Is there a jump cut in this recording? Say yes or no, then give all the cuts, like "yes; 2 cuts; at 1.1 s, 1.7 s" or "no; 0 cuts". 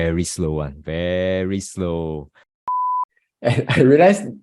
yes; 1 cut; at 2.7 s